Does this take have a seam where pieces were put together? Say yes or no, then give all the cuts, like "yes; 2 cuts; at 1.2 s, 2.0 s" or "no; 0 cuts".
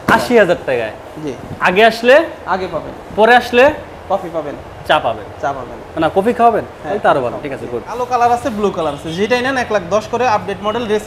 yes; 1 cut; at 8.0 s